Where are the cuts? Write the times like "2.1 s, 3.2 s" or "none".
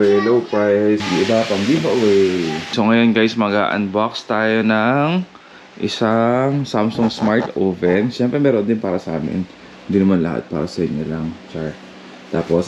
1.1 s, 2.7 s